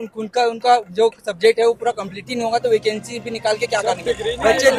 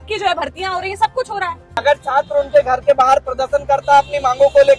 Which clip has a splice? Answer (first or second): second